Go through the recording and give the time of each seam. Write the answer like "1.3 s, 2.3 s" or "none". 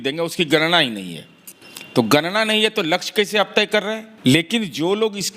4.1 s